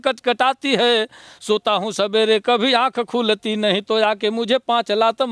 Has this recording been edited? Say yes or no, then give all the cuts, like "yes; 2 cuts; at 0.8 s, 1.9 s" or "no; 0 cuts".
no; 0 cuts